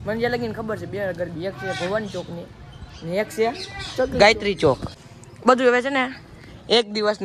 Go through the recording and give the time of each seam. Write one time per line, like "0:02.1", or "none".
0:04.9